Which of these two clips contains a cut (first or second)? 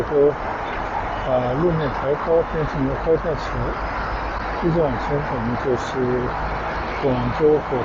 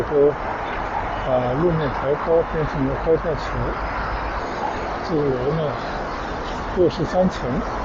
second